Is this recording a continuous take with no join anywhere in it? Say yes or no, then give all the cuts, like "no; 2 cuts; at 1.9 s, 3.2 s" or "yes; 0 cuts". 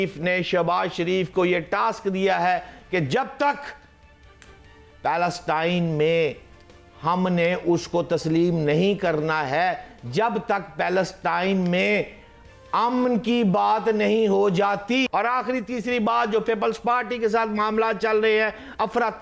yes; 0 cuts